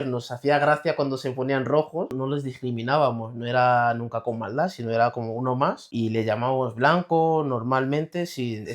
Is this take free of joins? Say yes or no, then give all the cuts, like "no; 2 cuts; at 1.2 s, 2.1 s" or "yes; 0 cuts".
no; 2 cuts; at 2.1 s, 5.8 s